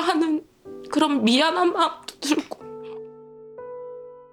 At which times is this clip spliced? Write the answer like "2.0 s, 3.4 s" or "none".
2.6 s